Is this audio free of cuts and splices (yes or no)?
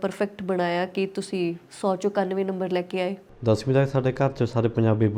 yes